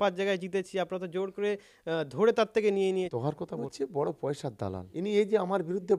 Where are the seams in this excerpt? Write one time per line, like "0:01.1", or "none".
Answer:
0:03.7
0:04.8